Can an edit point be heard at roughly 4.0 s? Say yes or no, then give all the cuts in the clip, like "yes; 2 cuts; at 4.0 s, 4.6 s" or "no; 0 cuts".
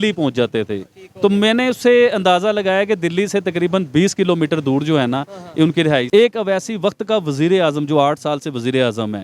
no; 1 cut; at 6.1 s